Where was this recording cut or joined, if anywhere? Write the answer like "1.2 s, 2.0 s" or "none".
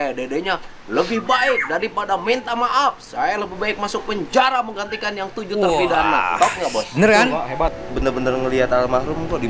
7.8 s